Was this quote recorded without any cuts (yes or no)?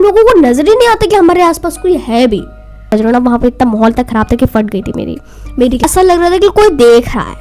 no